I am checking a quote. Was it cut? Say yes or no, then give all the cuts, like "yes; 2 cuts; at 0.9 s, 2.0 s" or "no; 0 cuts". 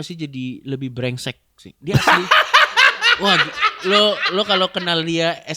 no; 0 cuts